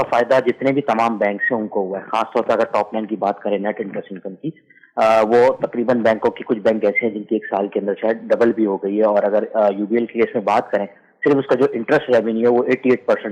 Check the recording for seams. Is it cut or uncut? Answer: uncut